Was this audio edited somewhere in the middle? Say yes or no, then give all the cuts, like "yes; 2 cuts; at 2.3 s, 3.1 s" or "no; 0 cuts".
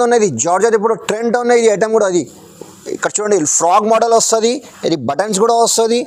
no; 0 cuts